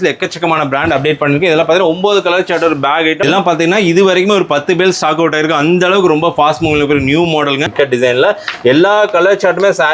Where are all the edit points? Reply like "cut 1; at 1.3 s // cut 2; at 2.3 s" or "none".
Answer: cut 1; at 3.2 s // cut 2; at 7.7 s